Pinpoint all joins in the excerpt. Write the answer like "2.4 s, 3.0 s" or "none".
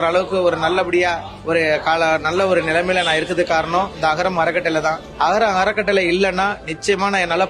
none